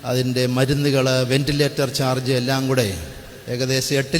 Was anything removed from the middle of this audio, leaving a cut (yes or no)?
no